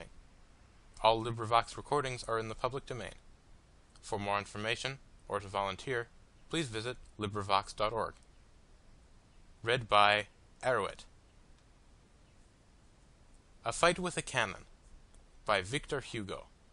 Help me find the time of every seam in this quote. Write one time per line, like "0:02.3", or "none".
none